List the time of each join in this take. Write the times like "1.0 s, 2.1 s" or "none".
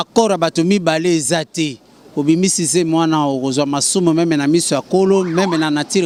none